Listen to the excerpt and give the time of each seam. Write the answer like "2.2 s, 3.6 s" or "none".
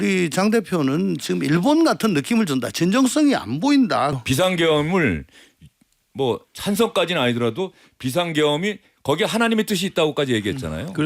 4.1 s